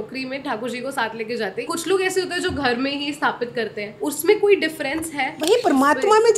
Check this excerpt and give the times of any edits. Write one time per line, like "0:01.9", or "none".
0:01.7
0:03.9
0:05.2